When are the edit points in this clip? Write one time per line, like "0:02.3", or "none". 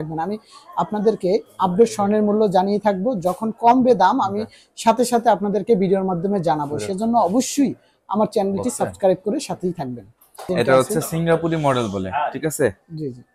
0:10.4